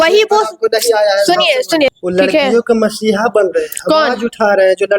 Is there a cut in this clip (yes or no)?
yes